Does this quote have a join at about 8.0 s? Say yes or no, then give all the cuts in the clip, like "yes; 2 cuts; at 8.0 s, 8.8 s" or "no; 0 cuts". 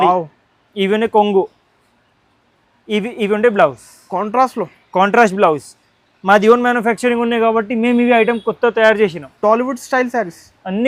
no; 0 cuts